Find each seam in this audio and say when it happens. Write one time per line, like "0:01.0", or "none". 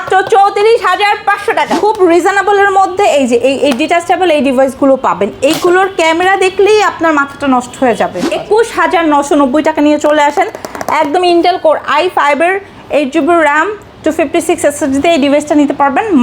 0:01.7
0:08.2